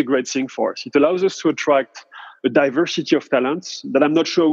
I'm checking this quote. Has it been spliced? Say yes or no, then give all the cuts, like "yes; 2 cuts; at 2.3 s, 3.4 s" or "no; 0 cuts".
yes; 1 cut; at 2.3 s